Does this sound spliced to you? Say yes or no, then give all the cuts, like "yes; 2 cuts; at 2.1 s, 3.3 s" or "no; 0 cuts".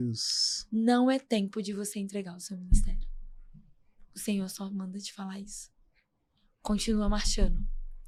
no; 0 cuts